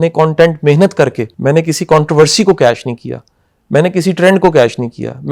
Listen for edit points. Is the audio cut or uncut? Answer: cut